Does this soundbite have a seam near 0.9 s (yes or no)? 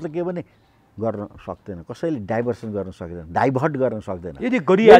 no